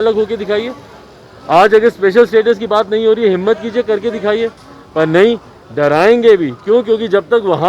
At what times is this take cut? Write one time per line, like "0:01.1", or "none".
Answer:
none

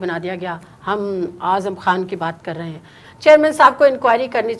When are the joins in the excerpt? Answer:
0:03.0

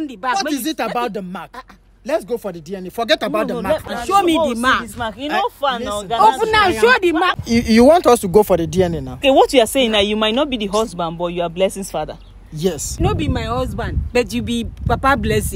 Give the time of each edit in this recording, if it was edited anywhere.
0:03.8
0:07.3
0:09.2
0:12.9

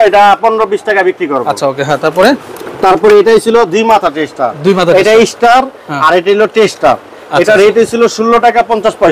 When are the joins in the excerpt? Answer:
none

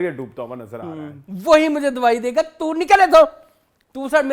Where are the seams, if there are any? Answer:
0:01.2

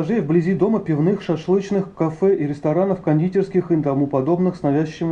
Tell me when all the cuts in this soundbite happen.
none

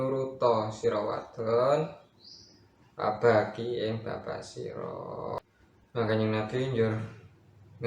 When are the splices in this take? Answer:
0:05.4

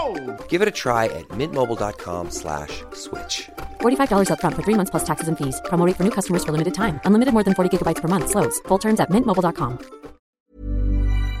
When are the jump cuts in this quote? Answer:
0:10.3

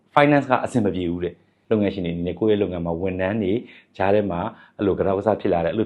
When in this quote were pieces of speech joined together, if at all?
0:01.5

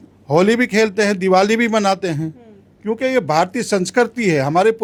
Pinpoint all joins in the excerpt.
none

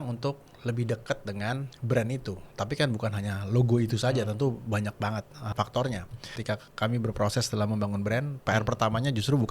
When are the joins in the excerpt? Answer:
0:01.7
0:05.5
0:06.3

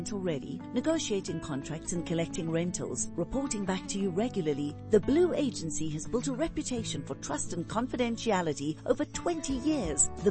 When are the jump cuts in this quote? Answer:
none

